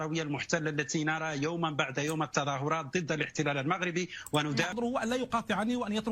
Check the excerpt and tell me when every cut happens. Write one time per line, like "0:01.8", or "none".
0:04.7